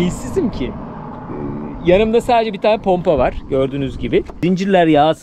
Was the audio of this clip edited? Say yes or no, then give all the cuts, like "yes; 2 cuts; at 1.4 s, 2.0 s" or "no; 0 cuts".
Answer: yes; 1 cut; at 4.3 s